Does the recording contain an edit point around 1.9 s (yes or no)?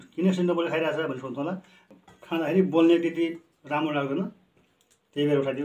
yes